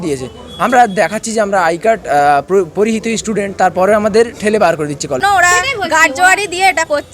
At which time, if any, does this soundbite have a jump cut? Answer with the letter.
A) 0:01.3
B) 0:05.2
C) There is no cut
B